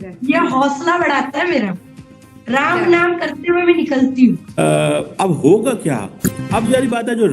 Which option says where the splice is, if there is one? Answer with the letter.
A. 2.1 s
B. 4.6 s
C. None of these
B